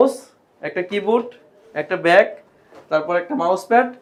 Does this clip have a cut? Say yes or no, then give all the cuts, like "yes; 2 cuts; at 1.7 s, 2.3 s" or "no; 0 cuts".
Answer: no; 0 cuts